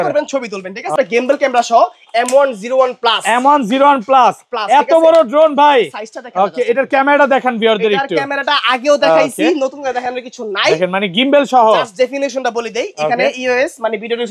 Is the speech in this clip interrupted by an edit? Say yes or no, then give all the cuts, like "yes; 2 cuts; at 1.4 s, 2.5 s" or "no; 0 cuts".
yes; 1 cut; at 0.9 s